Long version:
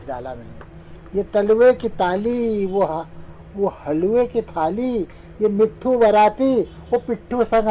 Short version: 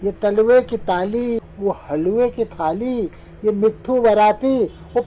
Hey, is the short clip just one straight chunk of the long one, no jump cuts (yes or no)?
no